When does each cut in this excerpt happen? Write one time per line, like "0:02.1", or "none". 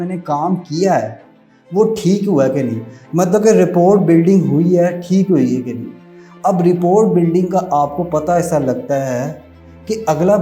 none